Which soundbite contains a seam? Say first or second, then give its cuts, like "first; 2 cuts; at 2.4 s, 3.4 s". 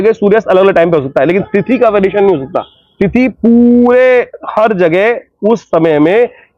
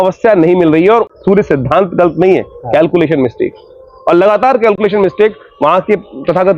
second; 1 cut; at 1.1 s